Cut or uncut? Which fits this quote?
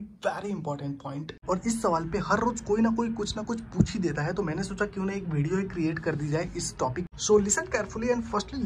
uncut